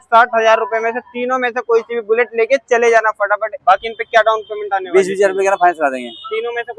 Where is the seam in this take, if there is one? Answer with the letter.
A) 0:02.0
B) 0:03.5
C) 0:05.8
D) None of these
B